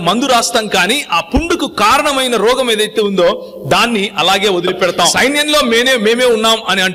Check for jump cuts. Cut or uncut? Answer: cut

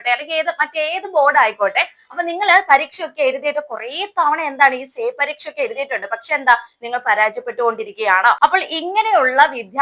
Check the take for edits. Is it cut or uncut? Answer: cut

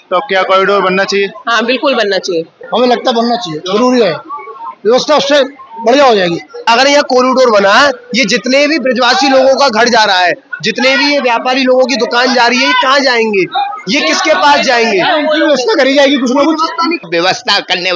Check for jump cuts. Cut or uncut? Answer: cut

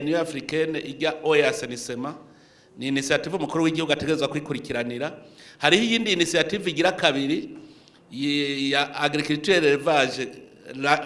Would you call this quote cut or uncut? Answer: uncut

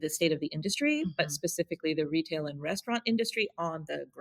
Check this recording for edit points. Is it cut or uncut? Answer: uncut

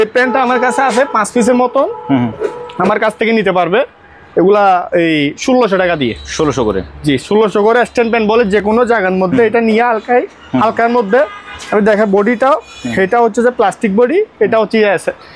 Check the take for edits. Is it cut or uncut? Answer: uncut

